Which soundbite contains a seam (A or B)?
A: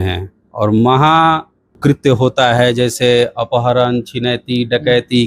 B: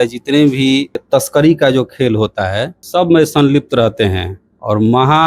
B